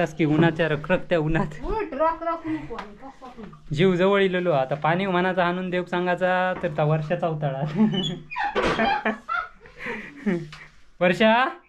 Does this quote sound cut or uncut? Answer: uncut